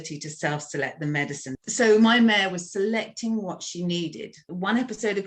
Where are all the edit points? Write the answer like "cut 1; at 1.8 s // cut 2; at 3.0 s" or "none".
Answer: cut 1; at 1.5 s // cut 2; at 4.5 s